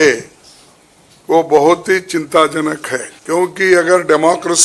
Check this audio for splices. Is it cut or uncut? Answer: cut